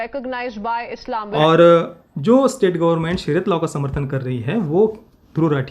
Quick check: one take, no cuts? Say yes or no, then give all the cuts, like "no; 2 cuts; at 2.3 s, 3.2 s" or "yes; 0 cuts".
no; 1 cut; at 1.3 s